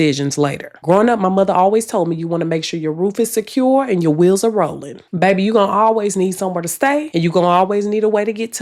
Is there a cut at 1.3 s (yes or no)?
no